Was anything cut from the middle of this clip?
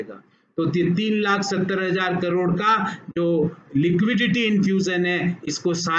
no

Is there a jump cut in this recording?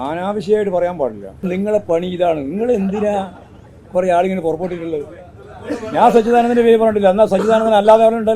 yes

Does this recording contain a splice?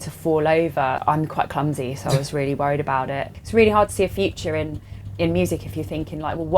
yes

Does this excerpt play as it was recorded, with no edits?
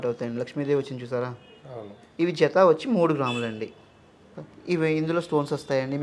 yes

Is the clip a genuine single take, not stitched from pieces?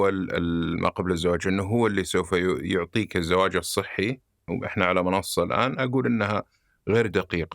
no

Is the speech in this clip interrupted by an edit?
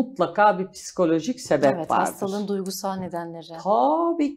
no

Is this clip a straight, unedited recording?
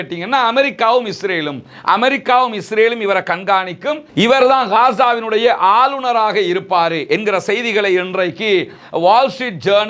yes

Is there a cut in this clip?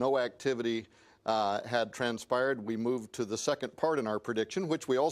yes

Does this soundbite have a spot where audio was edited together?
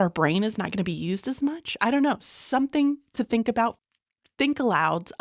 yes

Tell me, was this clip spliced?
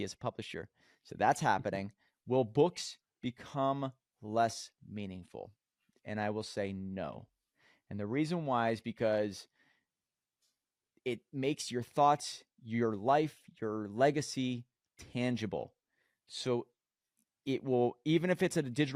no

